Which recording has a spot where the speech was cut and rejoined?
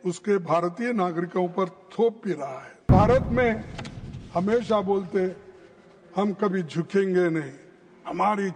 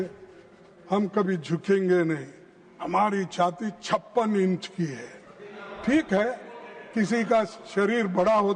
first; 1 cut; at 2.9 s

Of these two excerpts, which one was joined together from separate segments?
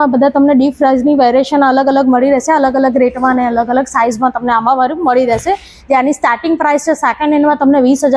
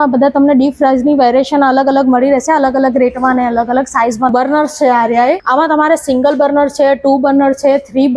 second; 2 cuts; at 4.3 s, 5.4 s

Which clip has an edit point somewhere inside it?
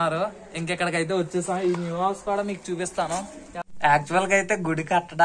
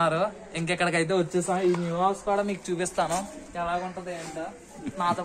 first; 1 cut; at 3.5 s

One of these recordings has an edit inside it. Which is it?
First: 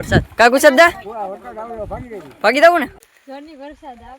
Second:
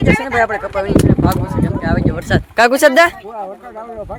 first; 1 cut; at 3.0 s

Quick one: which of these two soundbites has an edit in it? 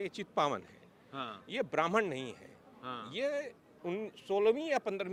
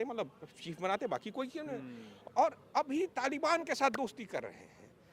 second; 1 cut; at 2.1 s

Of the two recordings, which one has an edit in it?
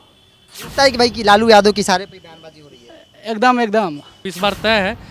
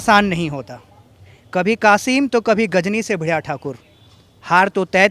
first; 1 cut; at 4.2 s

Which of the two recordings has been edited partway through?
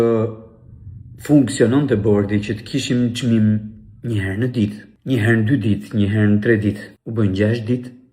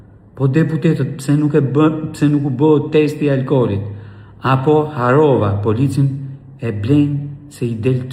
first; 2 cuts; at 4.9 s, 6.9 s

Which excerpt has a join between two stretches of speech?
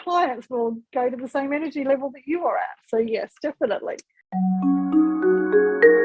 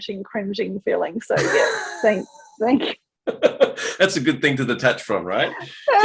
first; 1 cut; at 4.3 s

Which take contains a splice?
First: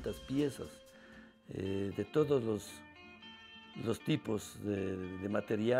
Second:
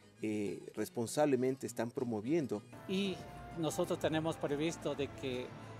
second; 1 cut; at 2.7 s

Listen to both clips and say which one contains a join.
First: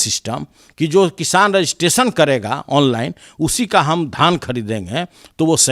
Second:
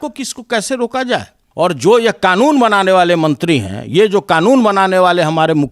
second; 1 cut; at 1.4 s

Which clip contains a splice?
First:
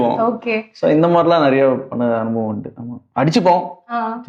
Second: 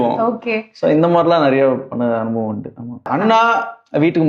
second; 1 cut; at 3.1 s

